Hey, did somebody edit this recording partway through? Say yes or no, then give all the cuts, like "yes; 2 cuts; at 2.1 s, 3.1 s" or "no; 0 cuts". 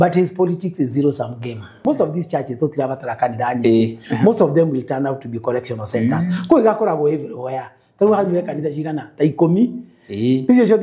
yes; 1 cut; at 1.8 s